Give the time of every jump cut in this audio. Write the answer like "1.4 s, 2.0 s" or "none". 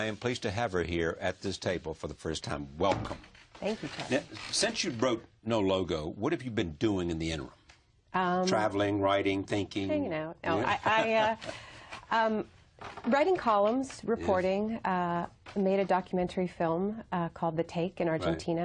none